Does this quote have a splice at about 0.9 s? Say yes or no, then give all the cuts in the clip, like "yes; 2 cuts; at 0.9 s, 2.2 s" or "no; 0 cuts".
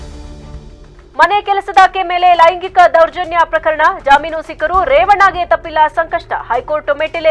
yes; 1 cut; at 0.9 s